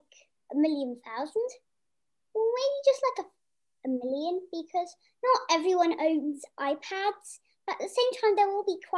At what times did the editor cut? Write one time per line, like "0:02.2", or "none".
none